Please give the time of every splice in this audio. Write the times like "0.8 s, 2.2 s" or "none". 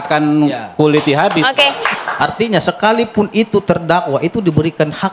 2.0 s